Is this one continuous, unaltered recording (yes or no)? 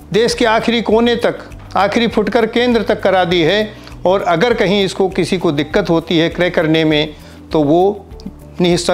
yes